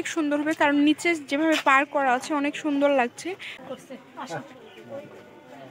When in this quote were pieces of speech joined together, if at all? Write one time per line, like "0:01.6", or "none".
0:03.5